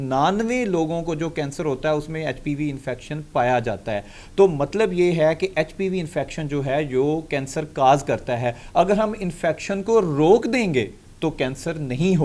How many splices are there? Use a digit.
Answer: 0